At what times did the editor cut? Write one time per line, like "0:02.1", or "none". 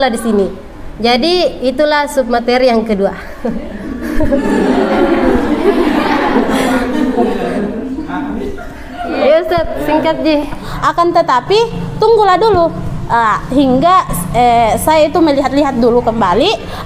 0:10.4